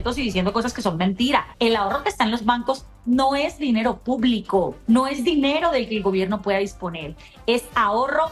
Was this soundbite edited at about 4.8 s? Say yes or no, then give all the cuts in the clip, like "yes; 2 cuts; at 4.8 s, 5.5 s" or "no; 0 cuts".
yes; 2 cuts; at 1.5 s, 4.8 s